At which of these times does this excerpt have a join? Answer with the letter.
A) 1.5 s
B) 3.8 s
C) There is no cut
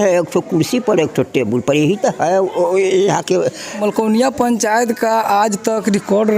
B